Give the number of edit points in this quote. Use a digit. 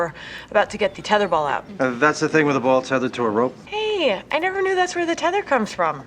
1